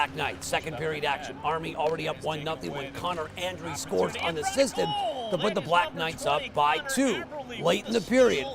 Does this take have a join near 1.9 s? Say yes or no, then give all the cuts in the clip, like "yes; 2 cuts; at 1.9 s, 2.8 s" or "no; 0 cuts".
yes; 1 cut; at 1.9 s